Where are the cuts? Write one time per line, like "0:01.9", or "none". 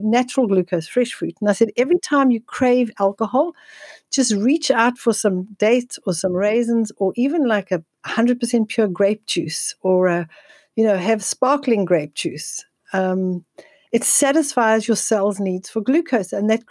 none